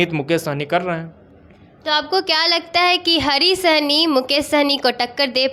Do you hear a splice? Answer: no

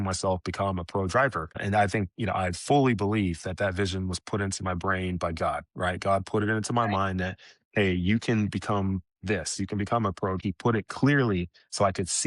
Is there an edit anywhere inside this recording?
yes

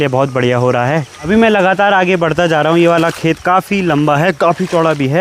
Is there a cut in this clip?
no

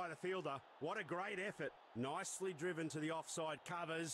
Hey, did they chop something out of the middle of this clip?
no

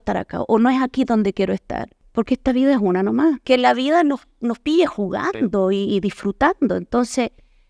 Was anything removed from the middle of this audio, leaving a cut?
yes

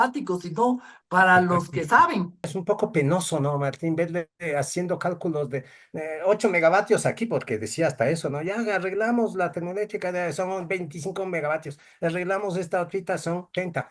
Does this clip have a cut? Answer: yes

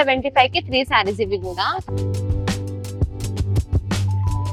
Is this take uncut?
yes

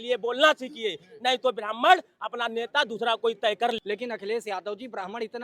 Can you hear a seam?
yes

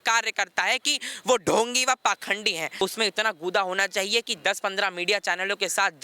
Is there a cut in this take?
yes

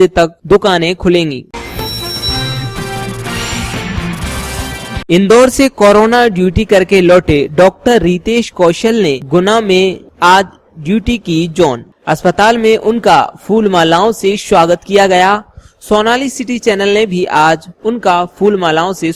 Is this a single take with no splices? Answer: no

